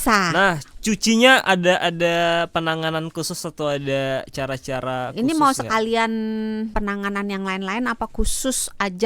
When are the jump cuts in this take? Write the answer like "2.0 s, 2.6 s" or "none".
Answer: 6.7 s